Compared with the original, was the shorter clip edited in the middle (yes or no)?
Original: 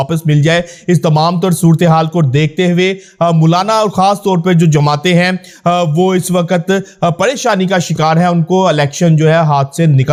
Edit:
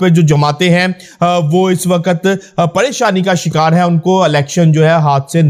no